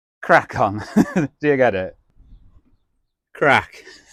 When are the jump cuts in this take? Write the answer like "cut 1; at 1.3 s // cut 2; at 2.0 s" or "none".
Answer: none